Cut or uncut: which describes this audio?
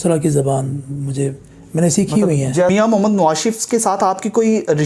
cut